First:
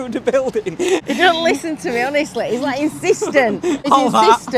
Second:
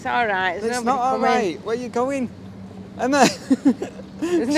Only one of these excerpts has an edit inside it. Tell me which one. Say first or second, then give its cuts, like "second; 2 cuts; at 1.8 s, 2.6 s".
first; 2 cuts; at 1.1 s, 3.9 s